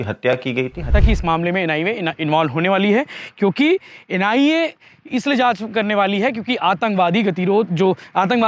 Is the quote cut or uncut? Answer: cut